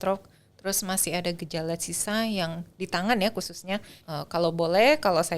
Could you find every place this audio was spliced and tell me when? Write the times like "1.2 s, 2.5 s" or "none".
4.0 s